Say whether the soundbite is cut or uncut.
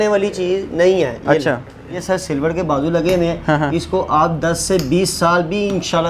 cut